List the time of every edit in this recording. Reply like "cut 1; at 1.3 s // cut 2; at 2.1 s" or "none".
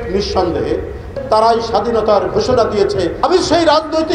cut 1; at 1.1 s // cut 2; at 3.2 s